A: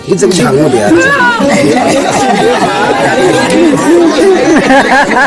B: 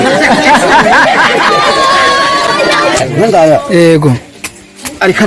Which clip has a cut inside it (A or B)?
B